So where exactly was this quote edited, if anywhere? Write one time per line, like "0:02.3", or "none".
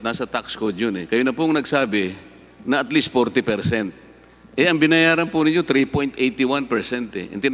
none